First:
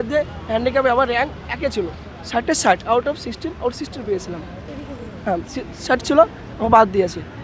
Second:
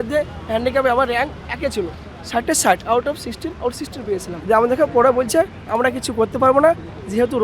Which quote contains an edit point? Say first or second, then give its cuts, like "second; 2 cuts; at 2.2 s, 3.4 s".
second; 1 cut; at 4.3 s